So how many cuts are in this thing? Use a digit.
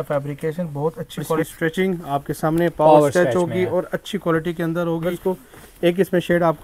2